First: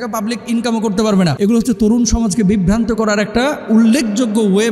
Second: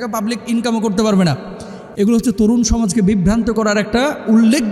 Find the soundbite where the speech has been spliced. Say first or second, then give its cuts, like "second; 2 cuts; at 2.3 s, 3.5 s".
first; 1 cut; at 1.3 s